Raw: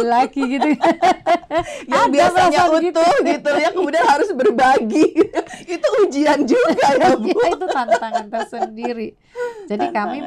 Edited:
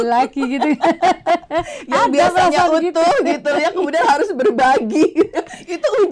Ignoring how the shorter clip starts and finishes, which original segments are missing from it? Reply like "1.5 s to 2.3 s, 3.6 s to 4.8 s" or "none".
none